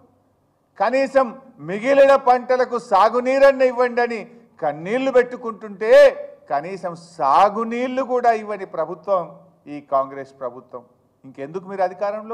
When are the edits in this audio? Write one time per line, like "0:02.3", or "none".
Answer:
none